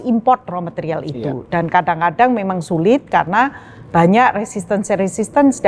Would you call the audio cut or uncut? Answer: uncut